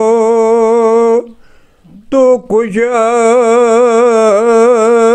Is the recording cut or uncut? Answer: uncut